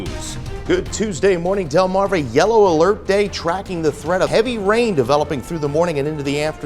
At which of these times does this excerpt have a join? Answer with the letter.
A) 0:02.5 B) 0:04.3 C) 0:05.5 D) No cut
B